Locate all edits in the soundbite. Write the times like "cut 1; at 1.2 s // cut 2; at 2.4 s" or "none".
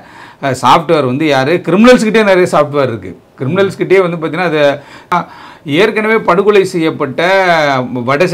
cut 1; at 5.1 s